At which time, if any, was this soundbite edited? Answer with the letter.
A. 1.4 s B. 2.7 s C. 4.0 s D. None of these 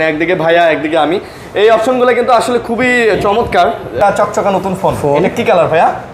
C